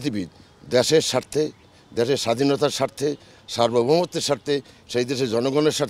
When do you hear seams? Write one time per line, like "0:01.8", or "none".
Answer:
none